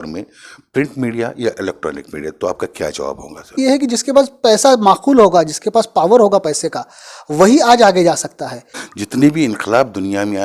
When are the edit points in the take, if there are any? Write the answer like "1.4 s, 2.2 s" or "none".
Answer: 3.6 s, 8.8 s